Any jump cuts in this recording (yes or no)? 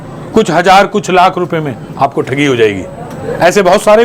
no